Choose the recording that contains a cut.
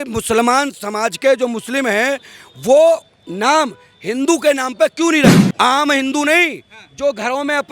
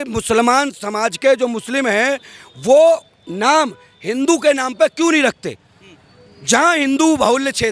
first; 1 cut; at 5.3 s

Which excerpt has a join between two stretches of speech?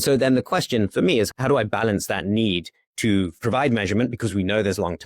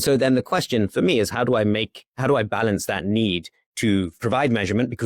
first; 1 cut; at 1.3 s

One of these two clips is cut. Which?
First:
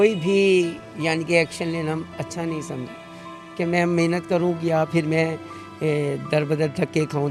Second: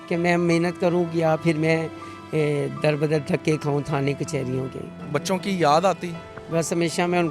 second; 1 cut; at 4.9 s

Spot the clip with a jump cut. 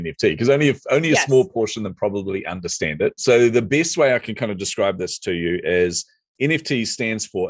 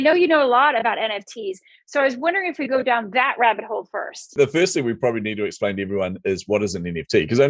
second; 1 cut; at 4.3 s

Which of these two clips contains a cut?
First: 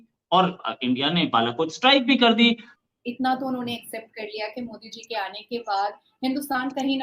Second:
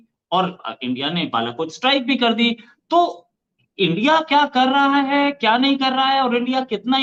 first; 1 cut; at 2.7 s

